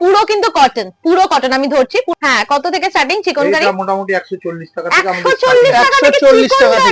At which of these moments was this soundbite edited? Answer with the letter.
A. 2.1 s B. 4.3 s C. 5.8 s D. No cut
A